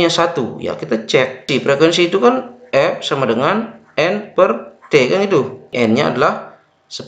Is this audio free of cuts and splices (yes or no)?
no